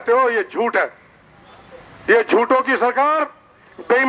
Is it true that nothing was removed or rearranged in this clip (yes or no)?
yes